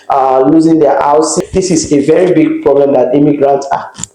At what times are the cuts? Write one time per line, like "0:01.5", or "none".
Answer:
0:01.4